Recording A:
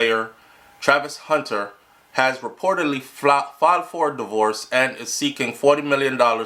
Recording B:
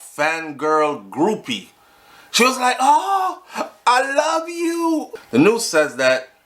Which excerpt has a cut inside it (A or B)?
B